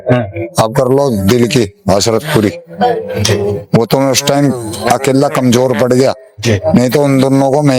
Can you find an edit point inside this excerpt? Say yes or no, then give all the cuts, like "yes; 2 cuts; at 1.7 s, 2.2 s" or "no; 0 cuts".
no; 0 cuts